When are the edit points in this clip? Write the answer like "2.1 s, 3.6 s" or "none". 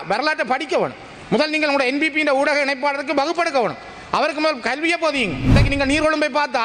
5.6 s